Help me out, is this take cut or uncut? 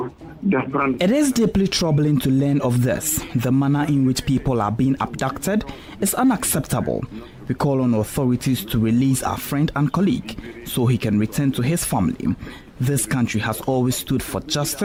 uncut